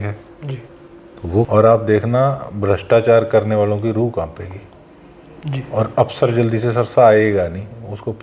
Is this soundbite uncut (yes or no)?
no